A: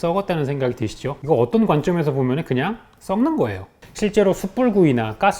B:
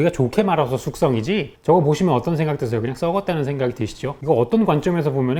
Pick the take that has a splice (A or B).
A